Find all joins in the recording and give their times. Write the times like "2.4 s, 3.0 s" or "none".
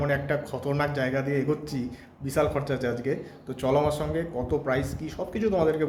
none